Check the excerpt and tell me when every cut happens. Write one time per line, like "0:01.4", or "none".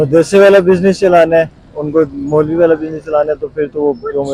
none